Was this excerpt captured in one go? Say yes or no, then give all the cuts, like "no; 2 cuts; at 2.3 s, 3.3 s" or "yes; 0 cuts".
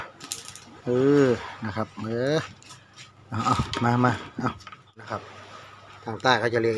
no; 1 cut; at 5.0 s